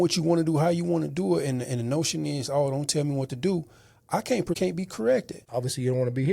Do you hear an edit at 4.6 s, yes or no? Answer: yes